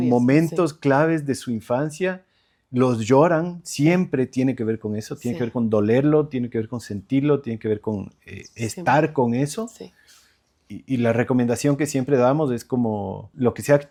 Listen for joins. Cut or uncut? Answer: uncut